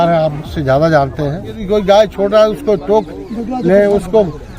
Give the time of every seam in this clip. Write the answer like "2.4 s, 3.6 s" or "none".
1.6 s